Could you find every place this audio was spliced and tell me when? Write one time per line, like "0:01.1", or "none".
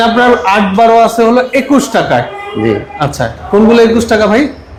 none